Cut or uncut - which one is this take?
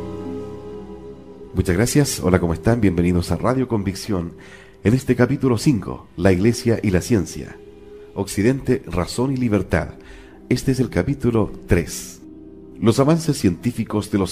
uncut